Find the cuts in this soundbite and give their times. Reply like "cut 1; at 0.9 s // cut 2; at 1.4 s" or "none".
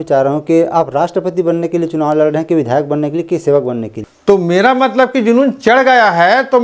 cut 1; at 4.0 s